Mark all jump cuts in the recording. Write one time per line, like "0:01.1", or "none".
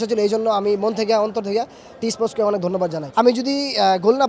0:03.0